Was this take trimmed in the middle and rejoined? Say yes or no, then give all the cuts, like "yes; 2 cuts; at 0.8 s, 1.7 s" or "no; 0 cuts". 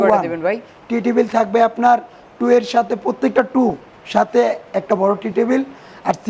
no; 0 cuts